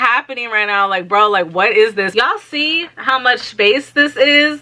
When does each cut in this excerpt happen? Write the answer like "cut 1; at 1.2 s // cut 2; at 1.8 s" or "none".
cut 1; at 2.1 s